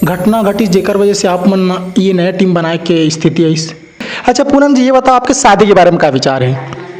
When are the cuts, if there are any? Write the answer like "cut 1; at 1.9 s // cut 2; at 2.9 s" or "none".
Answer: cut 1; at 4.1 s